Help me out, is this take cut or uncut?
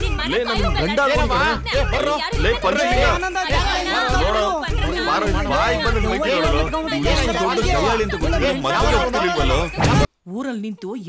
cut